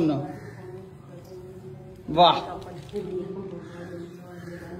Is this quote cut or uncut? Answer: uncut